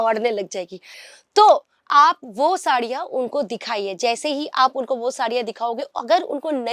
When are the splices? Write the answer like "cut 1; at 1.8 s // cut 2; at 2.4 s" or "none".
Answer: cut 1; at 1.0 s